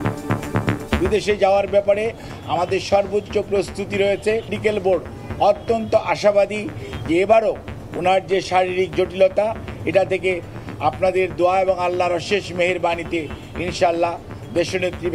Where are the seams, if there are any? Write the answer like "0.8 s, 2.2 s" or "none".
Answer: 0.9 s, 4.6 s